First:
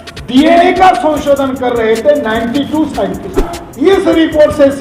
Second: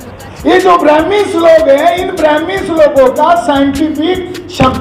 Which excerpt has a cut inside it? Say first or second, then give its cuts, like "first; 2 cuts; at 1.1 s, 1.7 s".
first; 1 cut; at 3.6 s